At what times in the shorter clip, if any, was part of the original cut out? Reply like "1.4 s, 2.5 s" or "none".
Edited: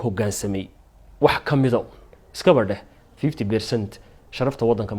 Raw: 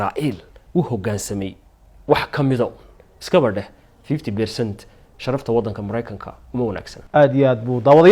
none